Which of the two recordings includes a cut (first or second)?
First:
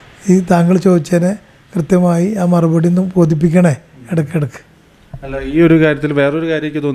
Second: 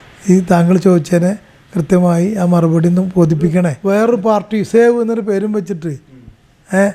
second